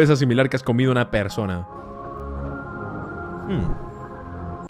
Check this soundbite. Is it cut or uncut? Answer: cut